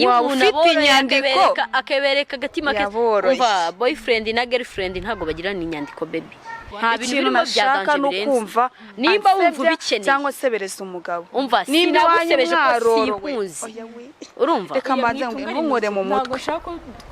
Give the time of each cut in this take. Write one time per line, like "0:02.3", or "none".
0:06.7